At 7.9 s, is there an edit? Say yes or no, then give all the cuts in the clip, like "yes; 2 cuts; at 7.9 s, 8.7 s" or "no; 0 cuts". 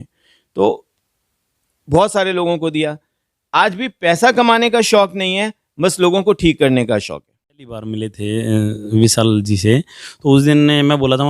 yes; 1 cut; at 7.9 s